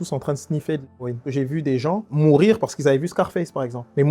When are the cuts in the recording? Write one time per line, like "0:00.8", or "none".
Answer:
0:01.2